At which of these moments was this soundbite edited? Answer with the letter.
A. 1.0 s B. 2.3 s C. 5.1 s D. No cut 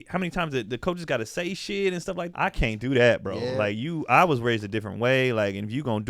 B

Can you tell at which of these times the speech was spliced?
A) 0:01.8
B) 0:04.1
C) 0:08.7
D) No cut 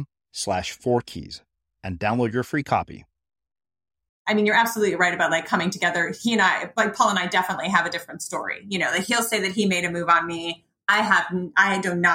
B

